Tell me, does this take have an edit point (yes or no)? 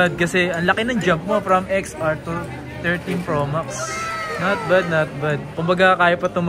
no